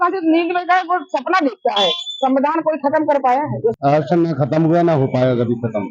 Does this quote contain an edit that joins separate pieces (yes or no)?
yes